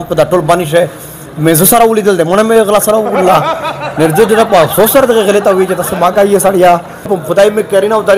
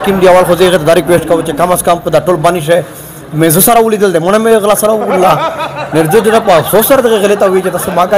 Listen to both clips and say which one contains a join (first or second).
first